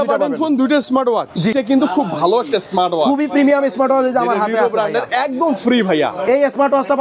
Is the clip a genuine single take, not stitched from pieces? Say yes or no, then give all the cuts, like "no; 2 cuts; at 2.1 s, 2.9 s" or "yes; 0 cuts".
no; 1 cut; at 1.5 s